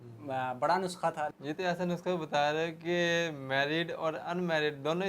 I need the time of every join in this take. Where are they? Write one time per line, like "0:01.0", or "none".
0:01.4